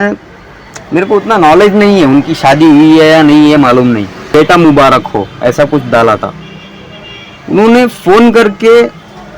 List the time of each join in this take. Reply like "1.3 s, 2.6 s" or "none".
4.2 s